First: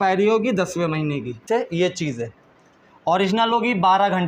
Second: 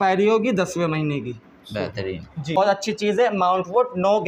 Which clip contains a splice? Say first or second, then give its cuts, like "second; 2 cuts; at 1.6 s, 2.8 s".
first; 1 cut; at 1.4 s